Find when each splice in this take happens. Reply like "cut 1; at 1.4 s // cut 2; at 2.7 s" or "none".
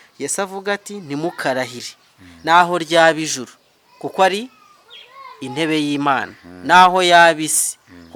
none